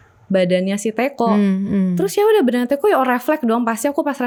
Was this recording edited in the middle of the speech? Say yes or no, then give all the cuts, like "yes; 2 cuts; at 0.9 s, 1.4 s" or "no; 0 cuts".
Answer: no; 0 cuts